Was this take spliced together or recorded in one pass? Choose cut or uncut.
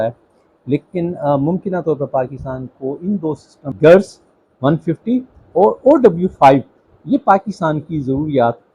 cut